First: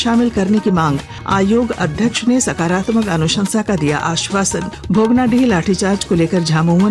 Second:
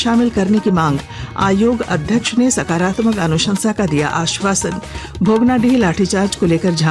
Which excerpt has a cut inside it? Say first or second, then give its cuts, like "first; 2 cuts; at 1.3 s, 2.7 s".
first; 2 cuts; at 1.1 s, 4.7 s